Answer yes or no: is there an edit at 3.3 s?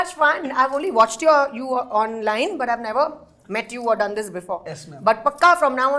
no